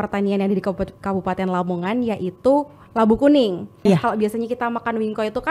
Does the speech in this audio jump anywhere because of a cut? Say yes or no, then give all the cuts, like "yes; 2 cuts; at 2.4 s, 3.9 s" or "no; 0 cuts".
yes; 1 cut; at 3.7 s